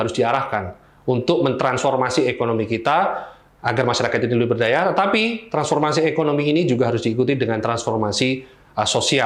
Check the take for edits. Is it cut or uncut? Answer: uncut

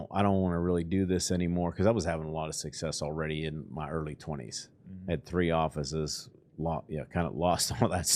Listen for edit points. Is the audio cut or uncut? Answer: uncut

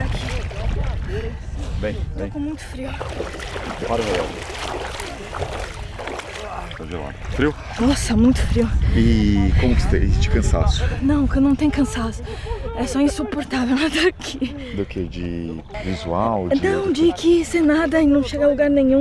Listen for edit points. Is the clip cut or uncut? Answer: uncut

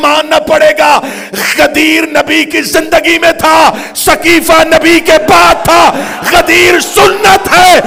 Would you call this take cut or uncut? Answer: uncut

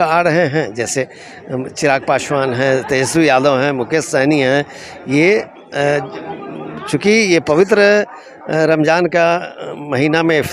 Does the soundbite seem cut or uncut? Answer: uncut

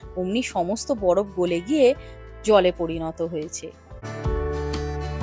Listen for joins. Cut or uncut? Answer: cut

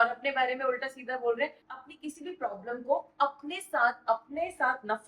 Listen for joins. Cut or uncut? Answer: cut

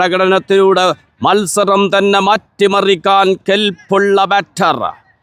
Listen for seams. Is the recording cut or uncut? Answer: uncut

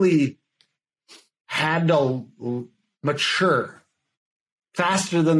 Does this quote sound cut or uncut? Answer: uncut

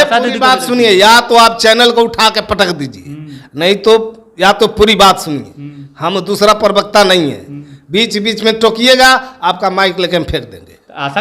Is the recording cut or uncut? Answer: uncut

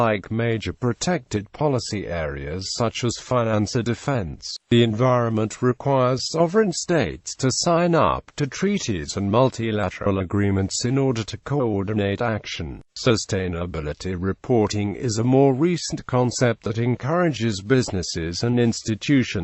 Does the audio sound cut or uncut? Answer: cut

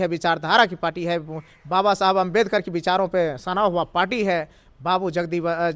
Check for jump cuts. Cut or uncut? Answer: uncut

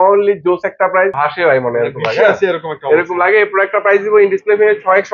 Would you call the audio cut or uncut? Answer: cut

